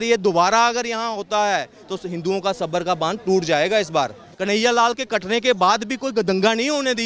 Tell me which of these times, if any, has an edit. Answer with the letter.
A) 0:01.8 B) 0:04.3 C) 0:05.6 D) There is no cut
B